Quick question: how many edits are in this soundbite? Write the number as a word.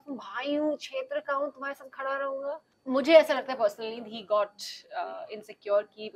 one